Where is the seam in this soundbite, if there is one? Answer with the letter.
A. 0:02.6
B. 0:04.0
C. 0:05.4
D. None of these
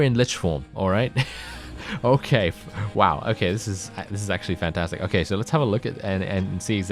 D